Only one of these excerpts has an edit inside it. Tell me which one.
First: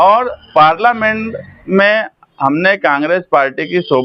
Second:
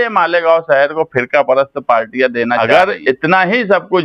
second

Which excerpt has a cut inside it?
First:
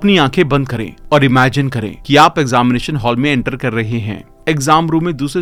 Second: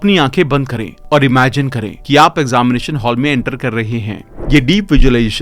second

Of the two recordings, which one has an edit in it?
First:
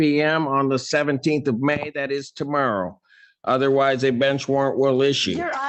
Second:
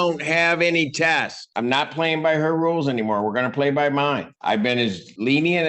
second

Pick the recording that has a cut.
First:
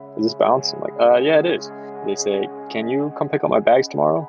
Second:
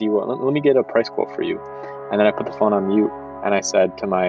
first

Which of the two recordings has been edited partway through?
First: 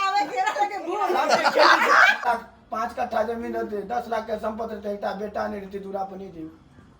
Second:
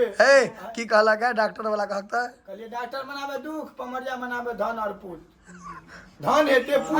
first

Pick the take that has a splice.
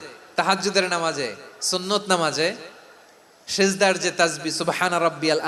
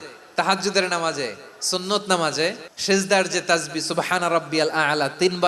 second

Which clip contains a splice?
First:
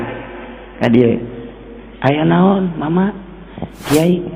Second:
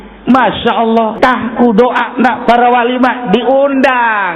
second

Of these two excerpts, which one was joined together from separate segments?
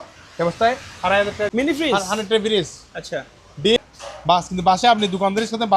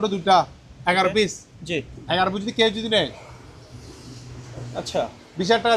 first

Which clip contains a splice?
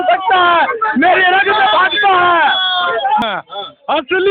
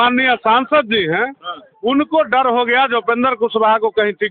first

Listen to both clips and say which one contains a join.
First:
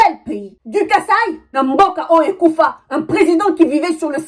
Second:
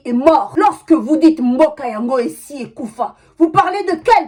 first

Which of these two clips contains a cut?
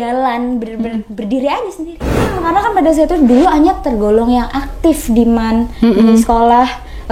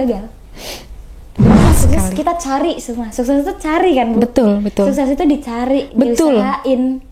first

